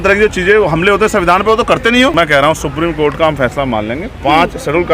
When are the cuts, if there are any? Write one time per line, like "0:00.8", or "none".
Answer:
0:02.1